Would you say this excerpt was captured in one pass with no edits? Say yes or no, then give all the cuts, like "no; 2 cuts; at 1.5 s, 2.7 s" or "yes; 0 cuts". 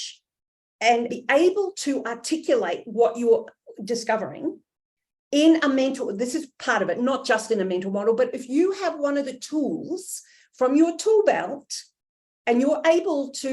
no; 1 cut; at 1.1 s